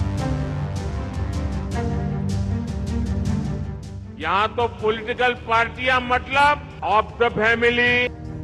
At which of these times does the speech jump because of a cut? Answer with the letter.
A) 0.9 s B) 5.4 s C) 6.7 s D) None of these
A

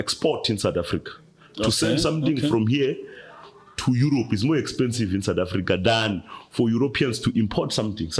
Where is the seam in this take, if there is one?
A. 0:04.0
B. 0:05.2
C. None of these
C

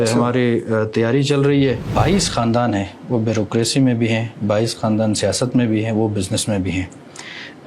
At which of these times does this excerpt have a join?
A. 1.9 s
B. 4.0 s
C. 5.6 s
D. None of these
A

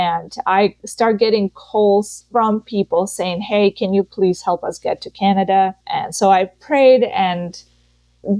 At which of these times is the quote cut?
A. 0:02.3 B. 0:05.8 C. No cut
B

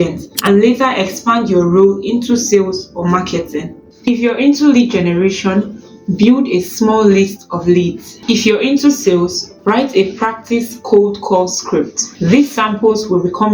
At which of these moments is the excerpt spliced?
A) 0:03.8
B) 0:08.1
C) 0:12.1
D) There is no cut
A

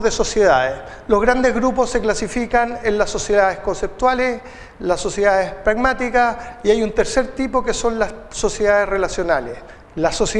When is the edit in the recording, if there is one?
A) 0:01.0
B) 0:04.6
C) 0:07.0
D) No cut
B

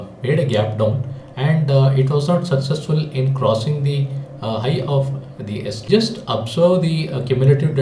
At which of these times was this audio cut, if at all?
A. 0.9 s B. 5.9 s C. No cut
B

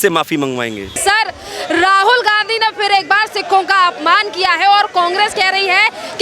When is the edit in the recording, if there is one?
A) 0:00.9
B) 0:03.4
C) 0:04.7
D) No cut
D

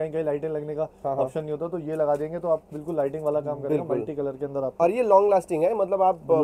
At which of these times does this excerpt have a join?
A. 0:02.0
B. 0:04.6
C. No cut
C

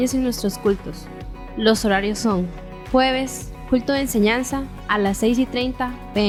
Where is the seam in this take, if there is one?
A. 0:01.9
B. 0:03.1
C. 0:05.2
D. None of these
D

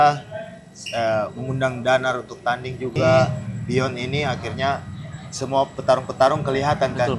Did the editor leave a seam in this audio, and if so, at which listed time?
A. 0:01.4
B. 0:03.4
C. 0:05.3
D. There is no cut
B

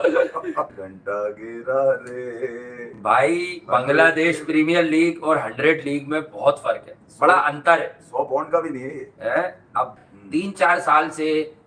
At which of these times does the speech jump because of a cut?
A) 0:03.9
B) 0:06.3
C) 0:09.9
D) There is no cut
D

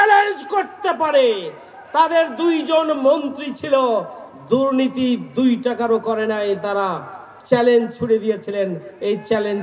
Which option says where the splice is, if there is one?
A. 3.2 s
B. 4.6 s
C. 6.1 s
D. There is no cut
D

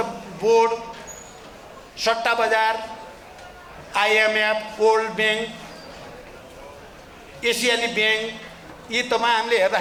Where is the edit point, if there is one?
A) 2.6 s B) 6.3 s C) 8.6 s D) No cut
D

